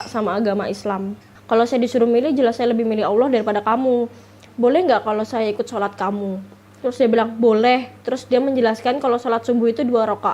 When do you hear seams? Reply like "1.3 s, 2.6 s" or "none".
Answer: 1.3 s, 4.5 s